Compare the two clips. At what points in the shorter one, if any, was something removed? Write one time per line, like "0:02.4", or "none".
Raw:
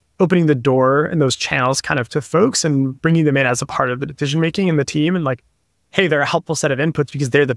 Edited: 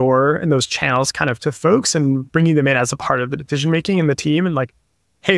none